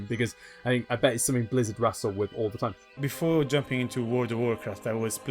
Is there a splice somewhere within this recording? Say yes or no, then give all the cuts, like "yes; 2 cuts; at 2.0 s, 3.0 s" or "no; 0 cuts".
yes; 1 cut; at 3.0 s